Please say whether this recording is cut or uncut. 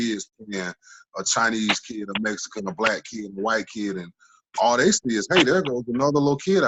uncut